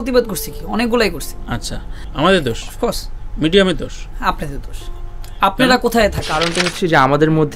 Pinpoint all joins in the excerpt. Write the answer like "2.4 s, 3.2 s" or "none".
6.2 s